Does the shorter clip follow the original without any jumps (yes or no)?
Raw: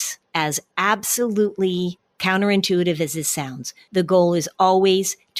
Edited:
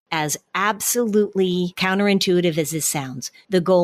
no